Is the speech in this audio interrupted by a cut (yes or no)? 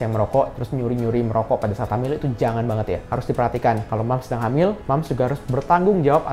no